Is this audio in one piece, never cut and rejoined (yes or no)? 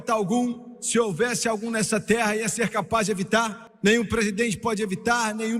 no